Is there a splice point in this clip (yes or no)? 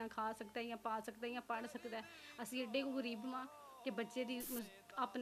no